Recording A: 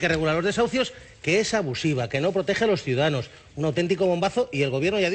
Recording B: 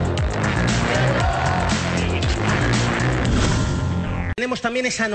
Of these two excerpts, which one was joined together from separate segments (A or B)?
B